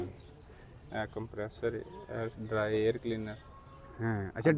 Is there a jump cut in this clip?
no; 0 cuts

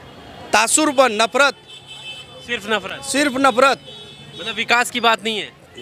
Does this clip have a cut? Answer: no; 0 cuts

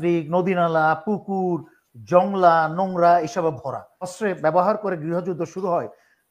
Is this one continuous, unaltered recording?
no; 1 cut; at 4.1 s

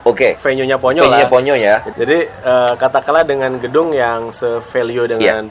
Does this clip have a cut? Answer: yes; 1 cut; at 1.9 s

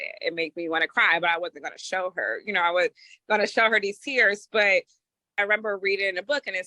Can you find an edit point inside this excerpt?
yes; 1 cut; at 5.4 s

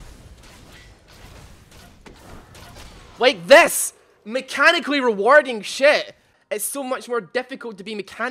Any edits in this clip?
yes; 1 cut; at 6.3 s

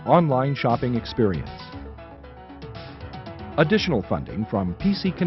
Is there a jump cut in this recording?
yes; 2 cuts; at 1.4 s, 3.4 s

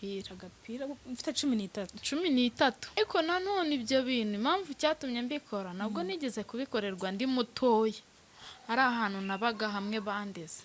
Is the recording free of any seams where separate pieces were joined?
no; 1 cut; at 3.0 s

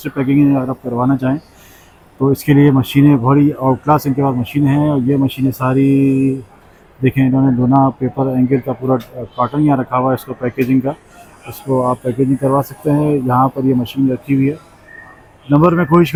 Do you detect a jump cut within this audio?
no; 0 cuts

